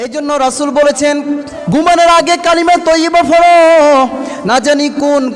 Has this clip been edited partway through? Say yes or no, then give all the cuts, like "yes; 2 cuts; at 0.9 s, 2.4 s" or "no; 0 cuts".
yes; 1 cut; at 1.5 s